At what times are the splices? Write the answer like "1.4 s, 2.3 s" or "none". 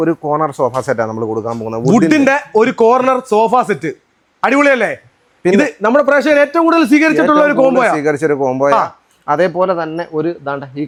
none